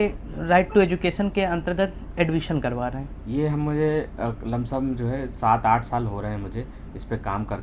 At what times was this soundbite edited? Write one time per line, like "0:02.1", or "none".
none